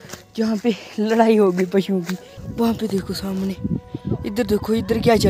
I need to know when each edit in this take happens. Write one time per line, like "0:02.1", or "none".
0:02.4
0:03.9